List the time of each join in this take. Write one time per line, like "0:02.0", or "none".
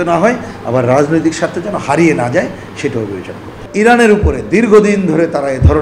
0:03.5